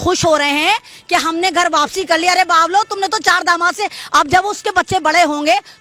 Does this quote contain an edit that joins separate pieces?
no; 0 cuts

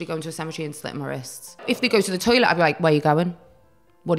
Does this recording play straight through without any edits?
no; 1 cut; at 1.6 s

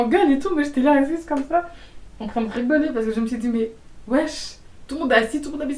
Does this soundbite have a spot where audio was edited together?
no; 0 cuts

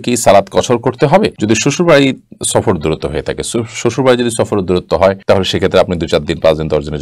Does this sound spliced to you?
no; 0 cuts

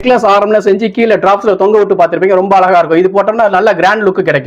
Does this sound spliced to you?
no; 0 cuts

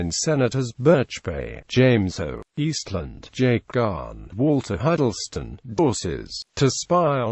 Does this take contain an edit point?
no; 0 cuts

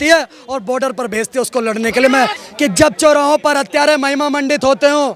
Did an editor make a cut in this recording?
yes; 1 cut; at 2.4 s

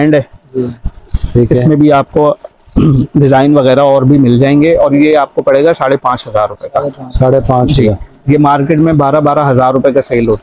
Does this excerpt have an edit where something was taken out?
no; 0 cuts

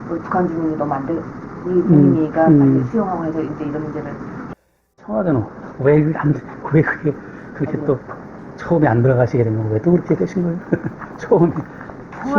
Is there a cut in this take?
yes; 1 cut; at 4.3 s

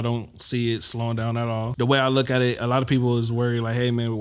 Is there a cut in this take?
yes; 1 cut; at 1.7 s

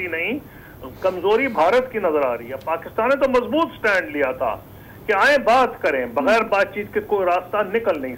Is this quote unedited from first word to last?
yes; 0 cuts

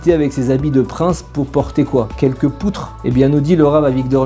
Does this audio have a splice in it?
no; 0 cuts

